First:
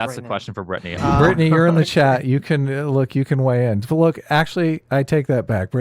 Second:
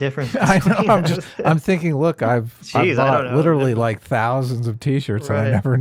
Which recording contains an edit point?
first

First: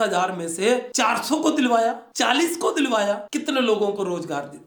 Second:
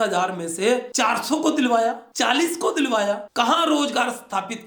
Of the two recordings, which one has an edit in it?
second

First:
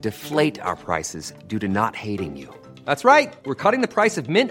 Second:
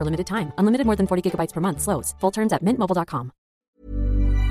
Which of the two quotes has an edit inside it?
second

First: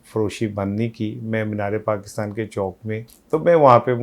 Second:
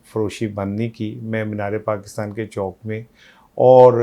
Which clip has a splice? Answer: first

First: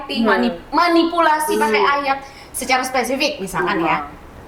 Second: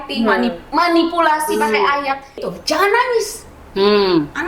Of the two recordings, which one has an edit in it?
second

